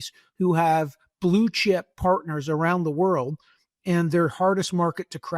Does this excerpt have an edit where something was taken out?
no; 0 cuts

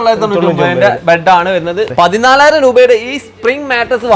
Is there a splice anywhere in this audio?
yes; 1 cut; at 1.9 s

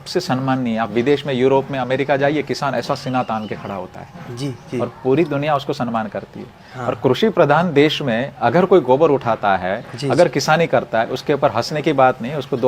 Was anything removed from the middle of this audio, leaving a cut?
no; 0 cuts

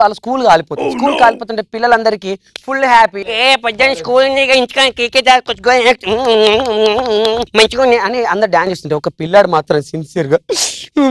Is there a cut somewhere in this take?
no; 0 cuts

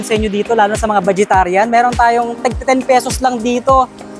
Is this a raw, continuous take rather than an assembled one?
yes; 0 cuts

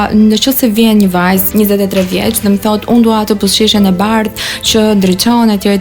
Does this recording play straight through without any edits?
no; 1 cut; at 1.5 s

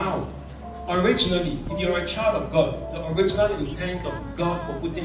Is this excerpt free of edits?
yes; 0 cuts

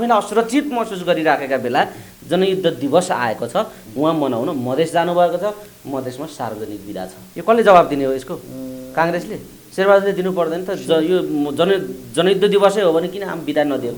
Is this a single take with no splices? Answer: no; 2 cuts; at 7.3 s, 9.5 s

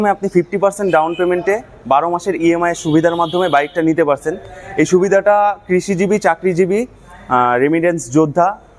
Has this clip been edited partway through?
no; 0 cuts

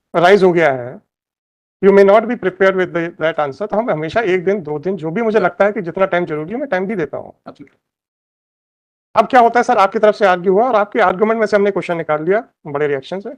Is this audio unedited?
yes; 0 cuts

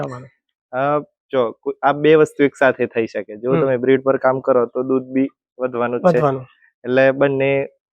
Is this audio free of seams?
yes; 0 cuts

